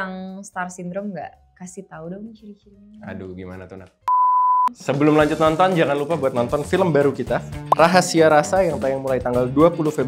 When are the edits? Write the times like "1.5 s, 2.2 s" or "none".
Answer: none